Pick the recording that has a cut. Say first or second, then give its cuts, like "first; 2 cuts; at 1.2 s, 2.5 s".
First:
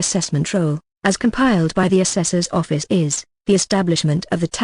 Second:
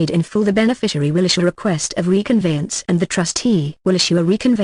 first; 1 cut; at 3.4 s